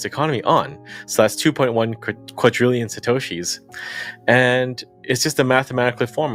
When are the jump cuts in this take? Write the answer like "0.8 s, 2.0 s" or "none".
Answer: none